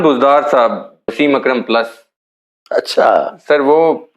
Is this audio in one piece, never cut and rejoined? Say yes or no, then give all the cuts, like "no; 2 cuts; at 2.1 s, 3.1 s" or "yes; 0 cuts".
no; 1 cut; at 1.1 s